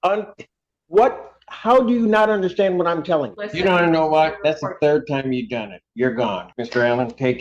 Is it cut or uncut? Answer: cut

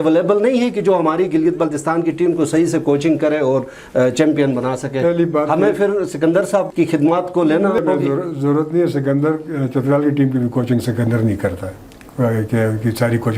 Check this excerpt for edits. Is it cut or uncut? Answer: uncut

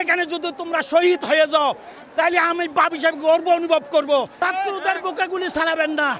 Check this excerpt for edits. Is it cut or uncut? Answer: cut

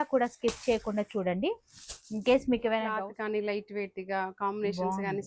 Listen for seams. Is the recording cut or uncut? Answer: cut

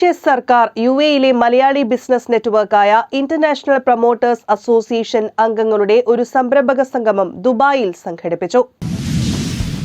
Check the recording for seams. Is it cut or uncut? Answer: cut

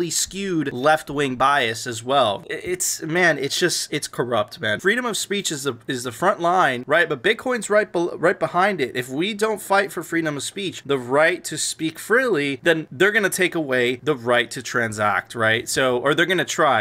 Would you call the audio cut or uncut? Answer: cut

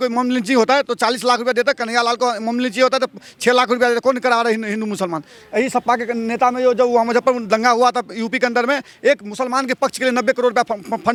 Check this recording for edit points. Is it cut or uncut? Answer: uncut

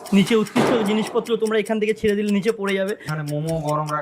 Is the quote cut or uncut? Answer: cut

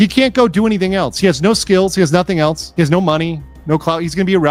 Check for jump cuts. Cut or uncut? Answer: uncut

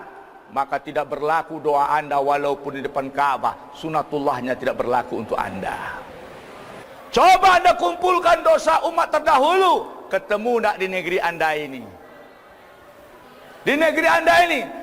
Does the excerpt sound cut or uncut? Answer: cut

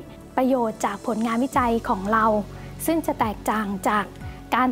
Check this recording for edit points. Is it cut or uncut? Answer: uncut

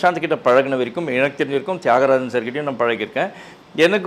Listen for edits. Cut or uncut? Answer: uncut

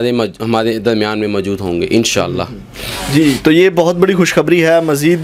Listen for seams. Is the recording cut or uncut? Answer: uncut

